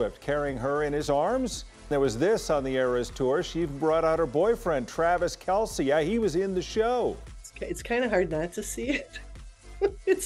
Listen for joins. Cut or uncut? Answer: cut